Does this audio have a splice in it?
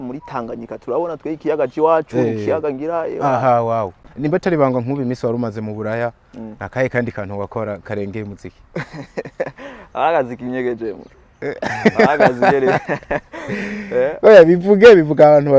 yes; 1 cut; at 4.0 s

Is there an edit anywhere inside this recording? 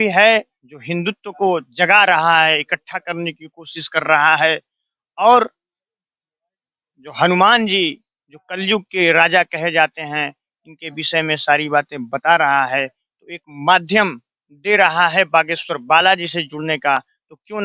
no; 0 cuts

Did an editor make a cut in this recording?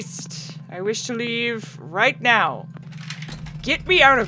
no; 0 cuts

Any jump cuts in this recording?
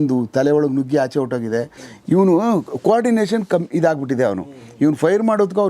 yes; 1 cut; at 1.8 s

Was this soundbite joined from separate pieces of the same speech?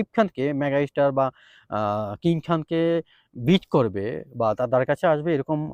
no; 0 cuts

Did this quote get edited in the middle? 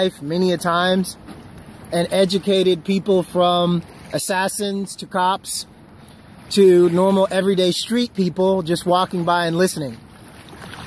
yes; 1 cut; at 2.0 s

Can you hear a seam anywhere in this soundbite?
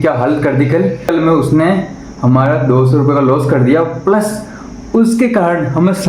yes; 1 cut; at 1.1 s

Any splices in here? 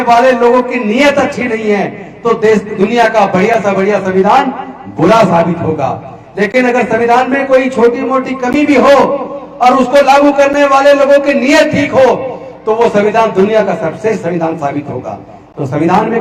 no; 0 cuts

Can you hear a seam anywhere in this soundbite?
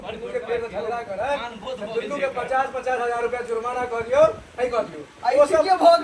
no; 0 cuts

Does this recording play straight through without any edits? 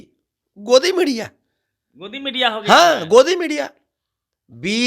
yes; 0 cuts

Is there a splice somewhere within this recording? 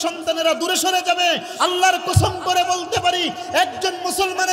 no; 0 cuts

